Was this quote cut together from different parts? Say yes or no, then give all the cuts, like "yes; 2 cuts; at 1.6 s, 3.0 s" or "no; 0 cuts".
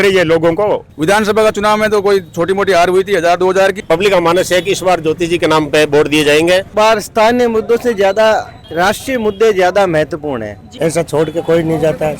yes; 4 cuts; at 0.9 s, 3.8 s, 6.7 s, 10.7 s